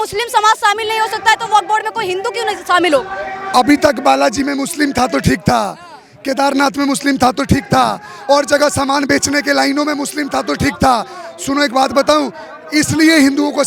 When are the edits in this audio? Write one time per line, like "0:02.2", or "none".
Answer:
none

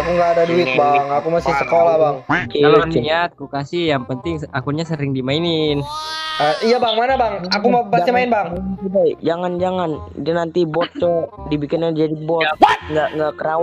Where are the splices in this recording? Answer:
none

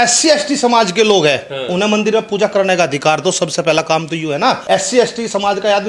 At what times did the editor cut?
0:04.6

